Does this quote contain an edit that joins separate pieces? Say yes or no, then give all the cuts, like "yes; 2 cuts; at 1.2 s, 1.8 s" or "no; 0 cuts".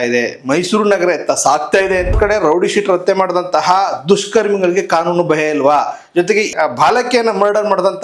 yes; 2 cuts; at 2.1 s, 6.5 s